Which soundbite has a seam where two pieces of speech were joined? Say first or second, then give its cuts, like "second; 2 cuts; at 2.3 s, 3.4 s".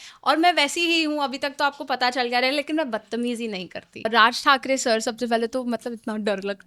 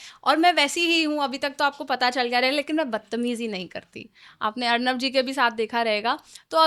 first; 1 cut; at 4.0 s